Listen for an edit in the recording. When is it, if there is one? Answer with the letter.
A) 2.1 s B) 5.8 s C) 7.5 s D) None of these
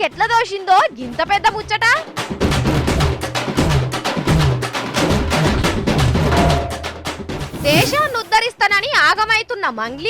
A